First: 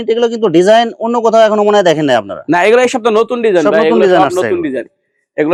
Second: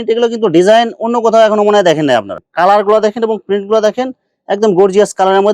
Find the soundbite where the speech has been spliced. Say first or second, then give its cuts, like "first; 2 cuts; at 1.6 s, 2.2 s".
second; 1 cut; at 2.3 s